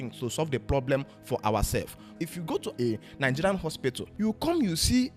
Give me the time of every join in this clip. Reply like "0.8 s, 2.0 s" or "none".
2.2 s, 4.1 s